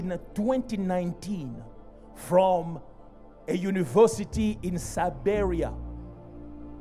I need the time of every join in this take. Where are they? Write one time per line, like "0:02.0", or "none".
none